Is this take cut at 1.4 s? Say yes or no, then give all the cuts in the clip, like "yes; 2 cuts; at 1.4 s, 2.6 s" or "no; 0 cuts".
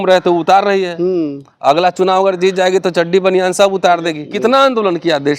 no; 1 cut; at 4.3 s